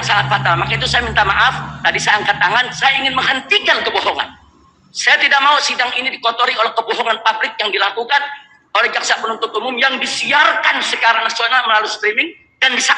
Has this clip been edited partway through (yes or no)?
no